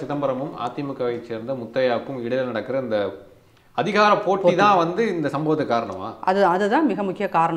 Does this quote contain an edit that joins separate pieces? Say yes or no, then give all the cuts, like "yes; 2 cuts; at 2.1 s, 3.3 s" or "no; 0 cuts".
no; 0 cuts